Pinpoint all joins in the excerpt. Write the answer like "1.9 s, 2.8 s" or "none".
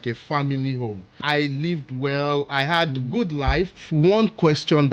1.2 s, 3.7 s